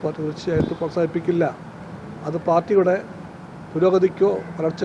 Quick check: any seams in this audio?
no; 0 cuts

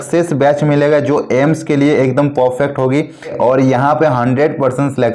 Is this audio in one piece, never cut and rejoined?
no; 1 cut; at 3.3 s

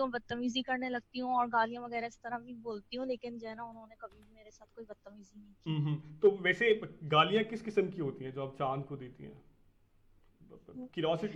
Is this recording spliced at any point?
no; 0 cuts

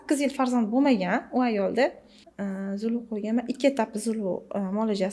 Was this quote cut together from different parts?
yes; 1 cut; at 2.2 s

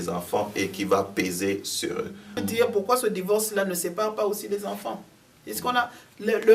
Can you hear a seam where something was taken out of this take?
yes; 1 cut; at 2.3 s

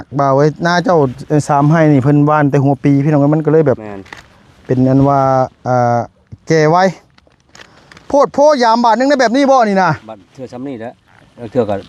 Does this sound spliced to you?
no; 0 cuts

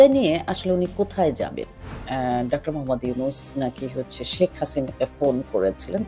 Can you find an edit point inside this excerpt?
yes; 1 cut; at 2.0 s

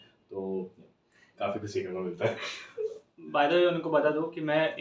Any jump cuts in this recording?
no; 0 cuts

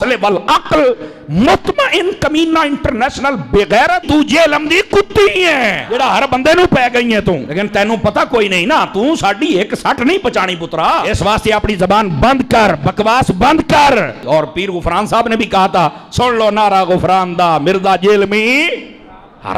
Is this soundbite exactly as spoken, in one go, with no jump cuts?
yes; 0 cuts

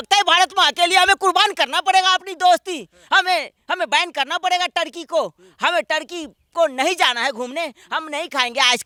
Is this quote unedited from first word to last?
yes; 0 cuts

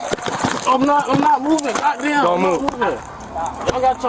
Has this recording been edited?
no; 0 cuts

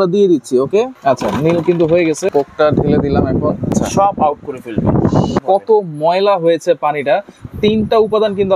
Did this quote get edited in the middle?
yes; 4 cuts; at 0.9 s, 2.3 s, 3.7 s, 5.4 s

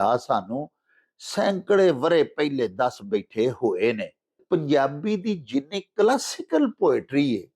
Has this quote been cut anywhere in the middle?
yes; 1 cut; at 4.4 s

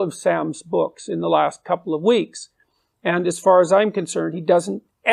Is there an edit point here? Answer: no; 0 cuts

